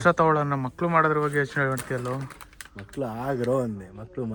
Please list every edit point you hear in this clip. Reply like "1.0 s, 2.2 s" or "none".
none